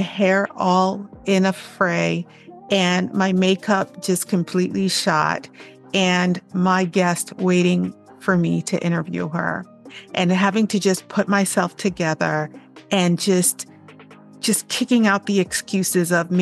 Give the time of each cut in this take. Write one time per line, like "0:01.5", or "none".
none